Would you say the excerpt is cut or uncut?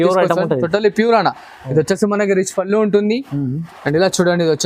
uncut